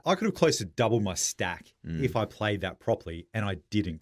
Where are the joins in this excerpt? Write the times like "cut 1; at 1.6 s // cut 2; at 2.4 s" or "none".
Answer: none